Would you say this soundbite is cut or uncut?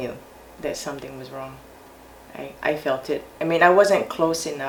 uncut